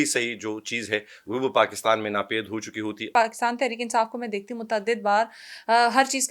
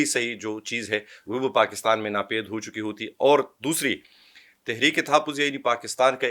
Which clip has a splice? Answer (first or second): first